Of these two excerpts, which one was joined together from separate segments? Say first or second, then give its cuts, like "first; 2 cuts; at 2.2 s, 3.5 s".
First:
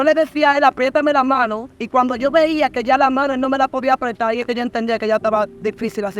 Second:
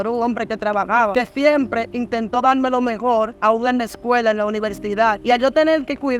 second; 3 cuts; at 1.1 s, 3.3 s, 5.2 s